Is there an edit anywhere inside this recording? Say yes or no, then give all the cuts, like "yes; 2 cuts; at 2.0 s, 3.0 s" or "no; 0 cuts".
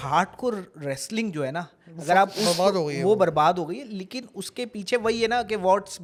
no; 0 cuts